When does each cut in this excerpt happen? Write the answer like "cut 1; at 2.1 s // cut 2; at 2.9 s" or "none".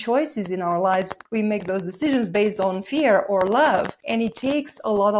cut 1; at 1.2 s // cut 2; at 4.0 s